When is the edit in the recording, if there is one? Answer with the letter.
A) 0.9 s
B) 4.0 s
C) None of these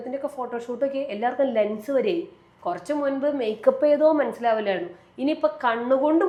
C